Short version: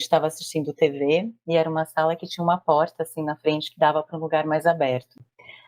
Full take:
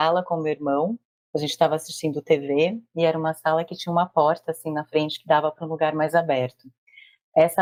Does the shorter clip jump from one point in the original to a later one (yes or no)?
no